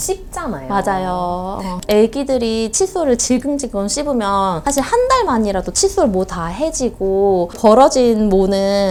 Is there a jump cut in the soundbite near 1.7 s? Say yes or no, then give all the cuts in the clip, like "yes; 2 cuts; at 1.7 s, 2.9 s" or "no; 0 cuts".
no; 0 cuts